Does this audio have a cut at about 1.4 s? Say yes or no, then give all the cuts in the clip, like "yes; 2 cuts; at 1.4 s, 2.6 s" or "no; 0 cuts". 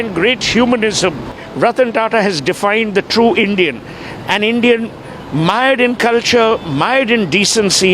yes; 1 cut; at 1.4 s